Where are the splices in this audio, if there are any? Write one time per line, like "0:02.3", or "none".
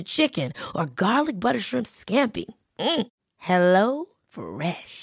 none